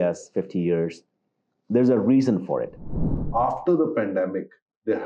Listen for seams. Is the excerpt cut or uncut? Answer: cut